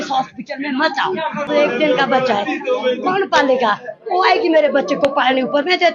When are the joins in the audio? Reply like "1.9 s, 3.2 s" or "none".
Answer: 1.5 s